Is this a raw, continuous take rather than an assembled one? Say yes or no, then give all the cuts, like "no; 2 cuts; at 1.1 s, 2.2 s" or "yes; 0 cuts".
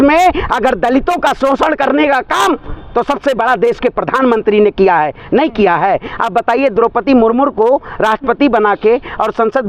yes; 0 cuts